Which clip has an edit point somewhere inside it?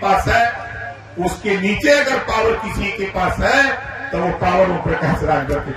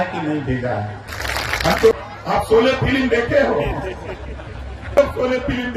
second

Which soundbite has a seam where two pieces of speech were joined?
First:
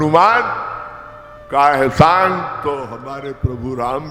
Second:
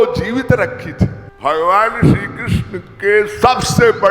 second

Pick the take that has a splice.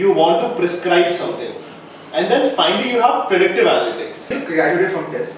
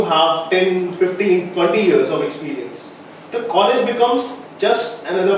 first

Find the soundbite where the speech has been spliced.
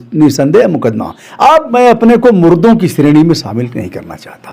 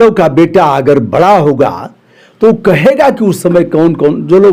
first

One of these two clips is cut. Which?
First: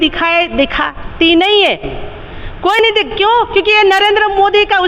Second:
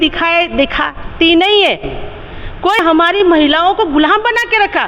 second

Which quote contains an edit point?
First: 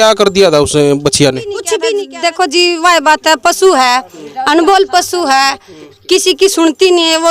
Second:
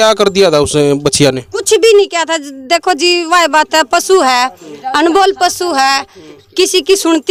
first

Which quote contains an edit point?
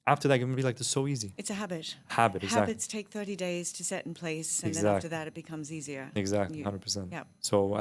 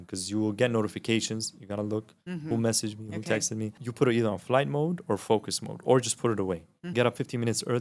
second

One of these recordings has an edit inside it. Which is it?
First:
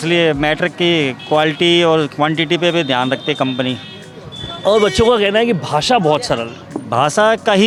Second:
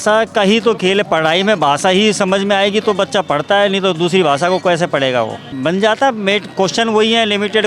second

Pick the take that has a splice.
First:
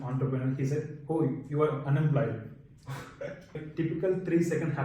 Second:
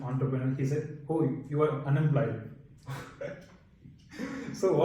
first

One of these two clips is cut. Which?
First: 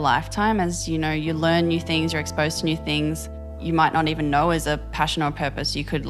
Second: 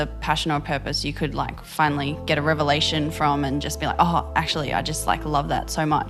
first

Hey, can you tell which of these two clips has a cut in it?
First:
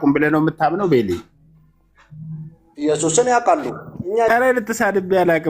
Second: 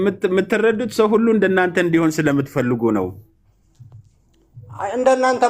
first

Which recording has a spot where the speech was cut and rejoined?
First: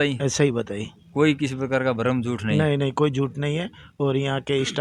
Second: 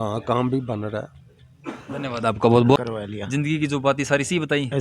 second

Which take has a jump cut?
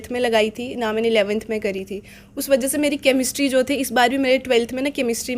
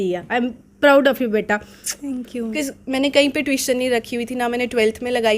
second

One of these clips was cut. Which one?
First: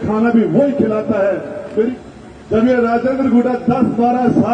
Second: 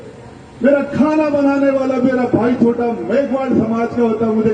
first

